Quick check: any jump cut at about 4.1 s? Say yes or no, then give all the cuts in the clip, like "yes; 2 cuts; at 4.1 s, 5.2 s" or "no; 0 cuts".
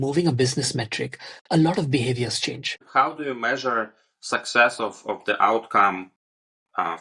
no; 1 cut; at 2.8 s